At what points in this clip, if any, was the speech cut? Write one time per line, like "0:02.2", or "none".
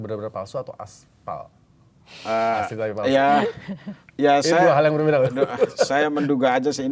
none